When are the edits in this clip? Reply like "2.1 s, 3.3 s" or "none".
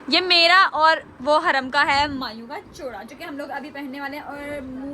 none